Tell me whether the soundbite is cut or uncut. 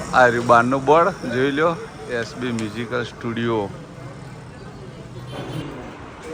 uncut